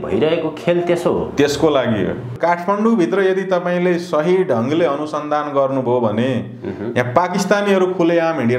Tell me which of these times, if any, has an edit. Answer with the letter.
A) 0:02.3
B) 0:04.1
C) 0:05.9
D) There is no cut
A